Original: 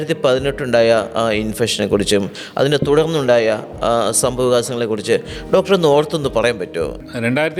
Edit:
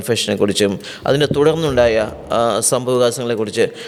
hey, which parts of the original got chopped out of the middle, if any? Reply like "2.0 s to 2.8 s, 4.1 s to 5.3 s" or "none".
none